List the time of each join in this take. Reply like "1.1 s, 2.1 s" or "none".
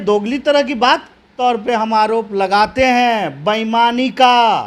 1.2 s